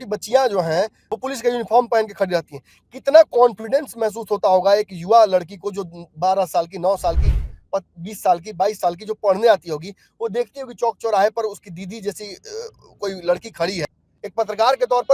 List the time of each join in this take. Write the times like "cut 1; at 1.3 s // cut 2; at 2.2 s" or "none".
none